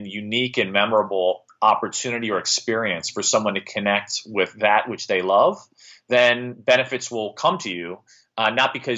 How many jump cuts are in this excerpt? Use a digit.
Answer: 0